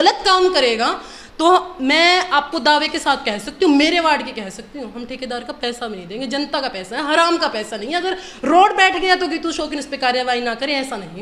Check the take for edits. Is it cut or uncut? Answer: uncut